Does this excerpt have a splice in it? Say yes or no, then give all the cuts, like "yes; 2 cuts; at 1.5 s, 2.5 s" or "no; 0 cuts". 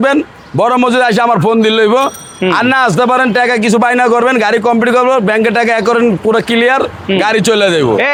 no; 0 cuts